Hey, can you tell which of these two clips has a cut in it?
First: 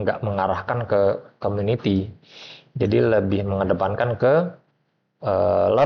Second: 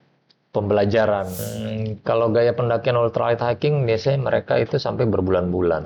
second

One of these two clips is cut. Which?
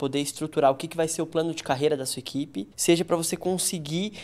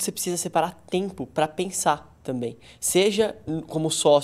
first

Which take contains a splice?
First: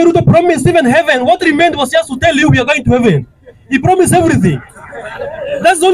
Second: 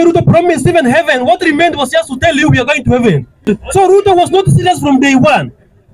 second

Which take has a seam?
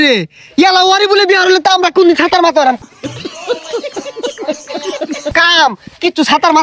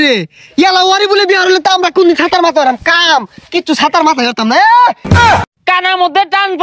second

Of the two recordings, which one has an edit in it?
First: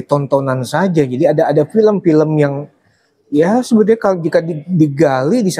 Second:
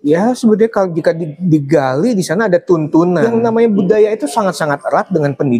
second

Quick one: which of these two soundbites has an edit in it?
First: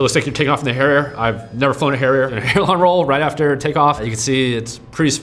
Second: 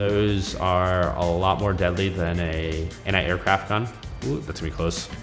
first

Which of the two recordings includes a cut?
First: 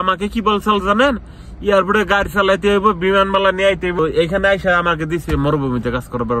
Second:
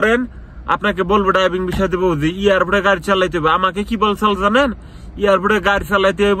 first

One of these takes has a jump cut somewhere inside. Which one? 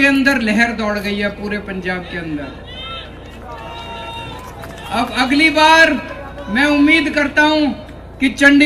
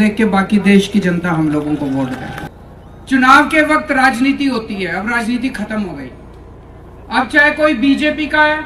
second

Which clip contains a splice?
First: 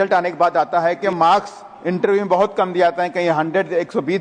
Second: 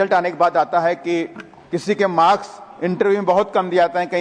first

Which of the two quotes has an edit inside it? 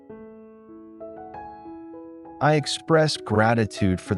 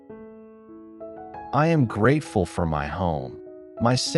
second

